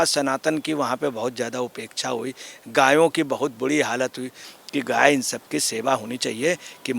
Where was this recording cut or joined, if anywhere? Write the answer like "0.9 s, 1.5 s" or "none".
4.5 s

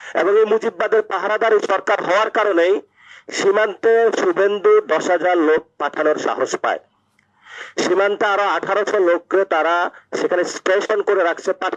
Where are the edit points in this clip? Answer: none

